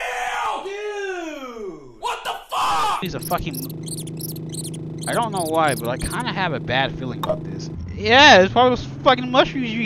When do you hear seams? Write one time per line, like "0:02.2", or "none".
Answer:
0:03.0